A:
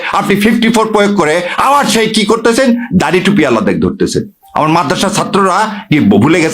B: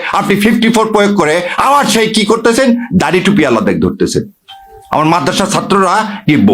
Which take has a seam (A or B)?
A